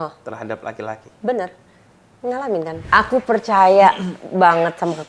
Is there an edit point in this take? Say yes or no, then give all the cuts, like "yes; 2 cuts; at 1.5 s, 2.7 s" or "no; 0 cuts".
yes; 1 cut; at 2.8 s